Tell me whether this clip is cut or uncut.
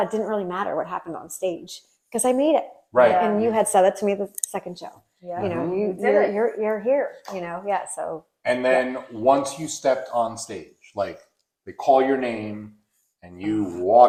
uncut